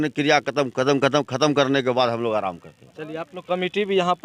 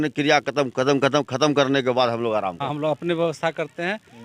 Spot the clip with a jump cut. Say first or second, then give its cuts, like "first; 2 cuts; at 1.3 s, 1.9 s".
second; 1 cut; at 2.7 s